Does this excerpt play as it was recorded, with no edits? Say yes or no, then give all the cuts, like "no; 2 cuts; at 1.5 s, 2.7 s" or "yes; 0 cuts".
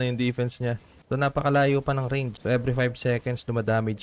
no; 2 cuts; at 0.9 s, 2.3 s